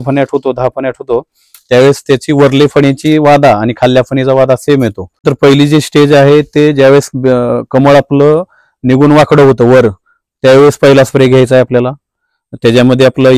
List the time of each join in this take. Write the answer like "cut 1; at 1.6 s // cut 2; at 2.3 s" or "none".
cut 1; at 5.2 s